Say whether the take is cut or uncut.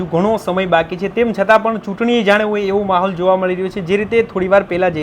uncut